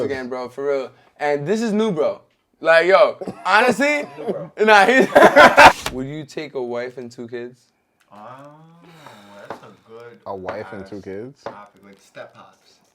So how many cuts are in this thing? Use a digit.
1